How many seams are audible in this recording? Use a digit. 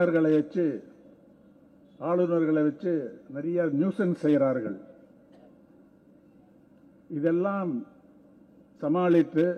0